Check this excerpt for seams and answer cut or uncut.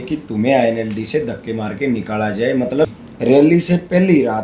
cut